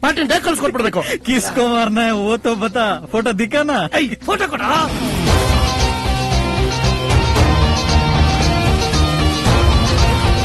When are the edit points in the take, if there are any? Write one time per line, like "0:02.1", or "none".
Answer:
none